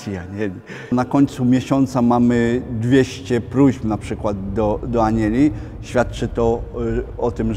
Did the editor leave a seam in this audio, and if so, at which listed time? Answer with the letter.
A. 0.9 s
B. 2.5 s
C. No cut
A